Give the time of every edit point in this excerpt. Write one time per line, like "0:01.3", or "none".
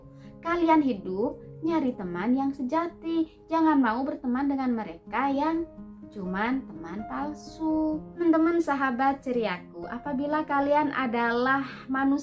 0:08.2